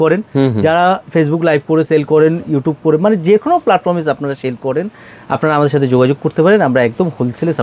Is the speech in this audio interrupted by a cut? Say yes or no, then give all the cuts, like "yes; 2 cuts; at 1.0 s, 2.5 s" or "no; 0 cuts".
no; 0 cuts